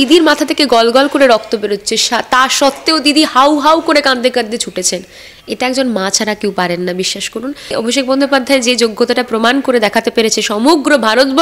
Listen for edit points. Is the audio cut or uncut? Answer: cut